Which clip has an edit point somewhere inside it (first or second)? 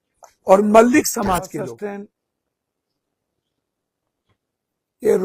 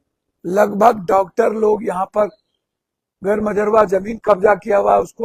first